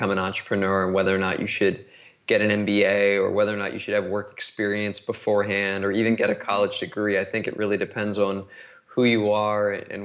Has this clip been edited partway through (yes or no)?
no